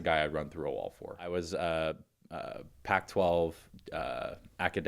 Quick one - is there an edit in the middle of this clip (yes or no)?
yes